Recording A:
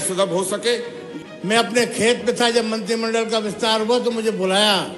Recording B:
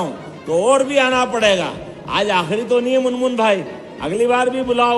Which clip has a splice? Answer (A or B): A